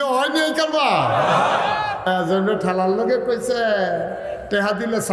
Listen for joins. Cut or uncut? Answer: cut